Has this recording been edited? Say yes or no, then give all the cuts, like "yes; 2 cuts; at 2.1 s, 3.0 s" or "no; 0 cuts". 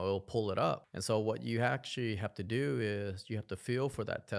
yes; 1 cut; at 0.9 s